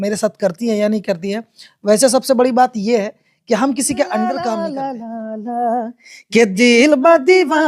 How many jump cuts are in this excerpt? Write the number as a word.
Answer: one